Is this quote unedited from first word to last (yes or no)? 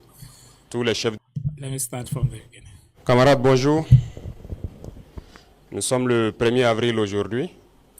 no